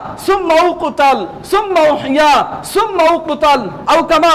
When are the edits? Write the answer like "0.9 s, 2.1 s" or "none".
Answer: none